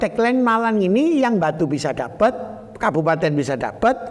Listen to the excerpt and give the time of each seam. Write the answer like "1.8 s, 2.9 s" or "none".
none